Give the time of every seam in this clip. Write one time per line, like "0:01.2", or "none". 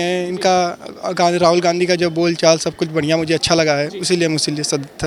none